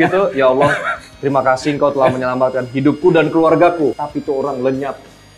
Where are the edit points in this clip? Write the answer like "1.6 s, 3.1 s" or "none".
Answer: 3.9 s